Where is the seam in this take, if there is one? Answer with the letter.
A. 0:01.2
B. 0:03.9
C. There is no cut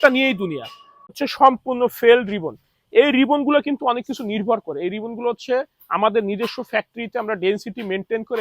A